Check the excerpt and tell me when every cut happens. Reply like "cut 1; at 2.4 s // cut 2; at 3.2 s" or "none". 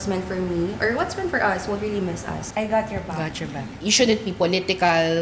cut 1; at 2.4 s // cut 2; at 3.7 s